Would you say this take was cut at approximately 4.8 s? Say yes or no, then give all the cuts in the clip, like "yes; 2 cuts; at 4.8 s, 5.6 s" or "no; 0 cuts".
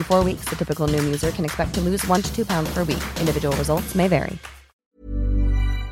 yes; 1 cut; at 4.8 s